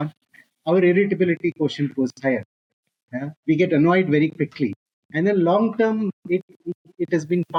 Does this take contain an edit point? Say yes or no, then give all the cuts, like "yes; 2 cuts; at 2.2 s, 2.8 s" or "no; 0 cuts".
no; 0 cuts